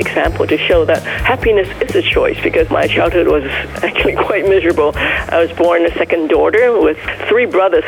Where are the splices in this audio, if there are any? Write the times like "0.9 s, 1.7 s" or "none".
2.7 s